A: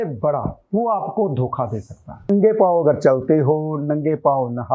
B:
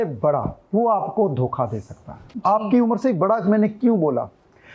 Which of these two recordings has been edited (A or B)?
A